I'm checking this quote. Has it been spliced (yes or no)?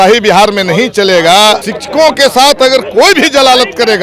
yes